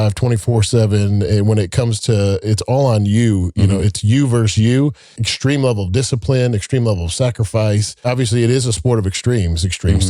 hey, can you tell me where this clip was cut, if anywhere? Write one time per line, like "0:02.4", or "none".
0:05.2
0:08.1